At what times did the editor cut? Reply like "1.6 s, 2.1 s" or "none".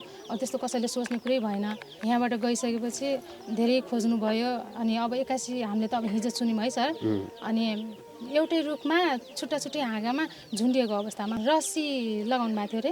1.9 s, 8.1 s, 11.3 s